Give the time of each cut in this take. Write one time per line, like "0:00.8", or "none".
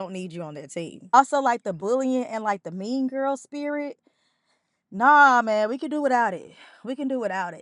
0:01.1